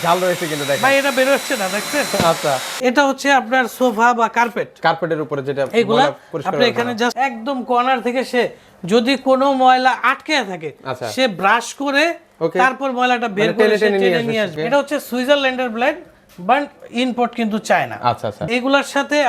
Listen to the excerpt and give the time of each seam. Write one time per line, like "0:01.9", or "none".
0:02.7
0:07.1
0:14.5
0:18.4